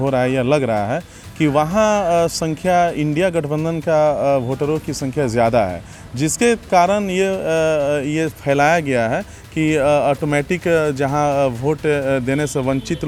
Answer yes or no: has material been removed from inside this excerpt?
no